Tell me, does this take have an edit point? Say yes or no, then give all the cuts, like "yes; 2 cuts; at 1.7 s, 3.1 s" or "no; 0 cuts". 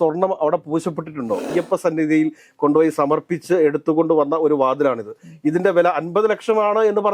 yes; 1 cut; at 1.5 s